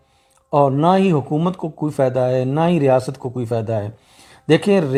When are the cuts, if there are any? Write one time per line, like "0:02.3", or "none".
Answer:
none